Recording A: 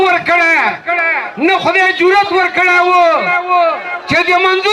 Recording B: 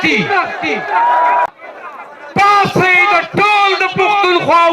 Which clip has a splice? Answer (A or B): B